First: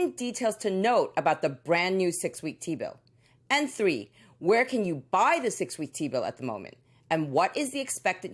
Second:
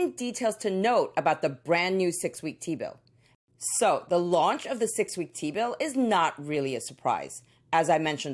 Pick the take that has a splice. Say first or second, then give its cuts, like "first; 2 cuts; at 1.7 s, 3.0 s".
first; 2 cuts; at 3.8 s, 6.7 s